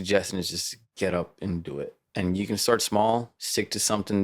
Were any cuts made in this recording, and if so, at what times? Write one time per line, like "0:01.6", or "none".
0:02.0
0:03.4